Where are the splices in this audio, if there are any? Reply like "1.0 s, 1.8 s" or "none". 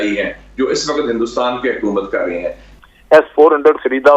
2.6 s